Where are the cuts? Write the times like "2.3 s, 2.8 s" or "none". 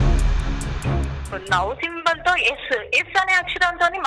1.3 s